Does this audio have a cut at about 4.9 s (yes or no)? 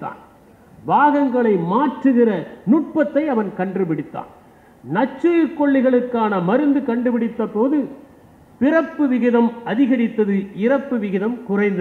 no